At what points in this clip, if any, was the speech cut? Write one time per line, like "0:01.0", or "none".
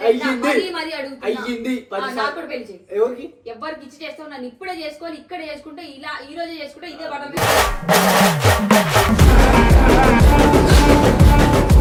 none